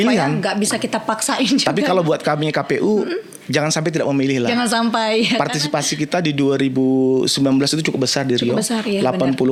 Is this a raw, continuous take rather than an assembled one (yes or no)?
yes